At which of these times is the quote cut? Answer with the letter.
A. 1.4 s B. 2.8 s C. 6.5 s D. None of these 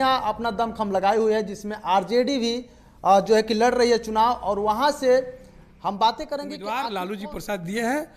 C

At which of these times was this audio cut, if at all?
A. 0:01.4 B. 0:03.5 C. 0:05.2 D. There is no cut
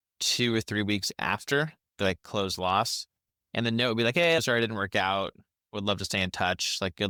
D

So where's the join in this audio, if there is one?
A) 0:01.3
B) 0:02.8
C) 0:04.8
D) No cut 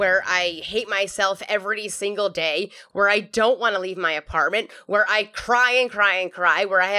B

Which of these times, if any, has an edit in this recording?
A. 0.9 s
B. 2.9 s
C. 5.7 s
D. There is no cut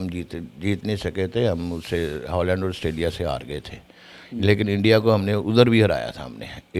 D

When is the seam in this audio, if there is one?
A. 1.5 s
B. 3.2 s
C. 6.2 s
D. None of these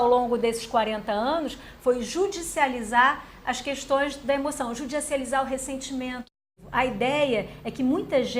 C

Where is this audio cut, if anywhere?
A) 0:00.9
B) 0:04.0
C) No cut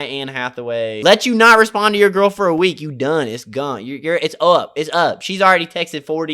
A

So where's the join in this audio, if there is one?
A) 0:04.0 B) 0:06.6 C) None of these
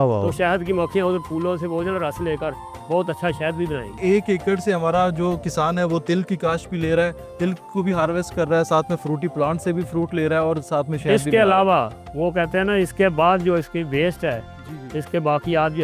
A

